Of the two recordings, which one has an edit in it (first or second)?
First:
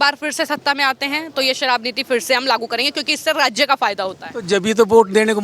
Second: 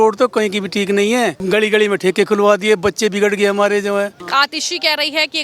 second